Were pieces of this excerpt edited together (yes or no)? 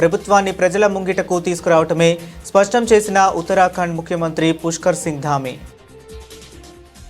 yes